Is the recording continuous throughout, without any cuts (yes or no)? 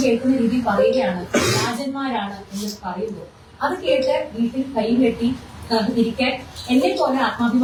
yes